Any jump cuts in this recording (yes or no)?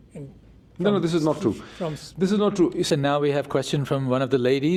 no